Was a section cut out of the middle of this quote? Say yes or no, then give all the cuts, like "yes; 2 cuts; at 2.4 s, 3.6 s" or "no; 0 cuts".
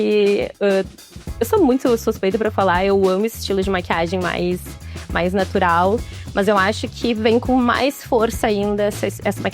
no; 0 cuts